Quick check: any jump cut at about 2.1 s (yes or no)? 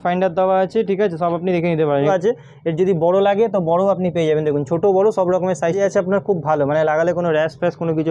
yes